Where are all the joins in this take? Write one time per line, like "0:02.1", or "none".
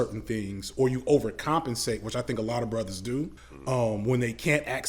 0:03.5